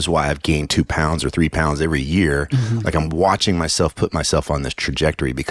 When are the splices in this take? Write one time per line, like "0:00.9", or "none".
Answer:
none